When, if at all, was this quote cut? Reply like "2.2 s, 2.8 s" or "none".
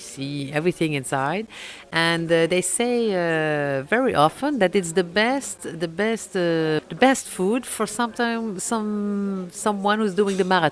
6.9 s